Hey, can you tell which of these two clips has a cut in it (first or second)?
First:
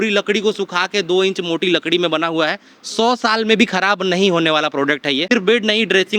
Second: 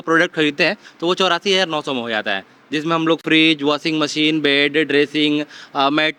first